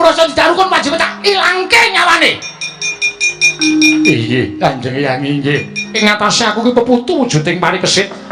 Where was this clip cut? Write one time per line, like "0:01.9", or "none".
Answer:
0:06.0